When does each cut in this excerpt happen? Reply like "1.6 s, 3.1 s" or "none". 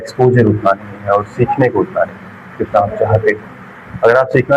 none